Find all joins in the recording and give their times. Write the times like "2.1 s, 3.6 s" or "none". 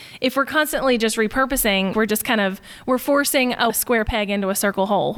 1.9 s, 3.7 s